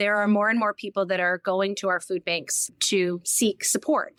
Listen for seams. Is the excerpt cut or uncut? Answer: uncut